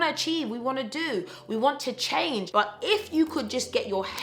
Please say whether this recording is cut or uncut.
cut